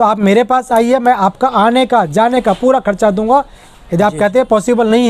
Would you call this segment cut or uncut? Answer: uncut